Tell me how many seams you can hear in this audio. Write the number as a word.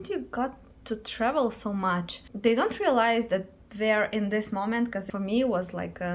two